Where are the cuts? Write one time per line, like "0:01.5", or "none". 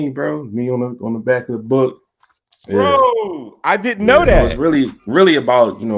0:04.6